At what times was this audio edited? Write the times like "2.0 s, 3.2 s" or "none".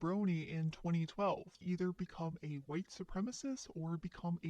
1.5 s